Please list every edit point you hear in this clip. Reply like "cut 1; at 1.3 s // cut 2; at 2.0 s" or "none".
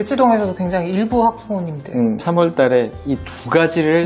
cut 1; at 2.2 s